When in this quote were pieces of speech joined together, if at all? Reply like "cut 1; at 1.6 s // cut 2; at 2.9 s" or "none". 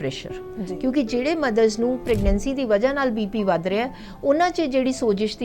cut 1; at 2.0 s